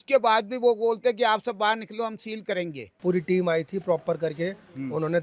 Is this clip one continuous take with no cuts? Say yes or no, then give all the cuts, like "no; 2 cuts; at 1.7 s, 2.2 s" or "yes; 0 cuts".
no; 1 cut; at 2.9 s